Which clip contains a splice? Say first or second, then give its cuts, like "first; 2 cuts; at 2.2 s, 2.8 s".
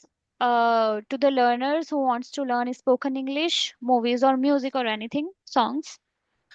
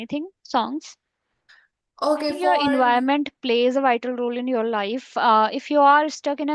second; 1 cut; at 2.6 s